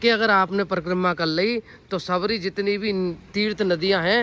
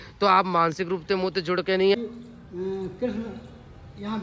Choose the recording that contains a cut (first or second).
second